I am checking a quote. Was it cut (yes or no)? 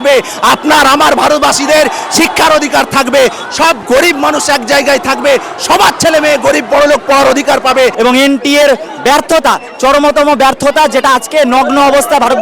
yes